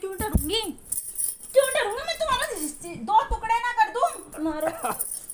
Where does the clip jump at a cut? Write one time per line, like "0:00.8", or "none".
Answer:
0:04.3